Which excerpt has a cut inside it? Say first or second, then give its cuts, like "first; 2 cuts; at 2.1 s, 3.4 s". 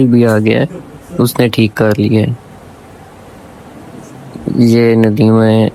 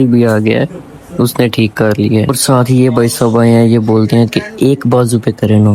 second; 1 cut; at 2.4 s